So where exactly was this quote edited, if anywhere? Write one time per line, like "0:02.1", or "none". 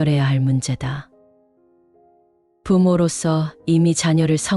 0:01.1
0:02.6